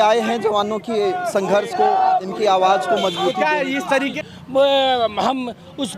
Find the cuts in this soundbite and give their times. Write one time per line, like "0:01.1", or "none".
0:04.1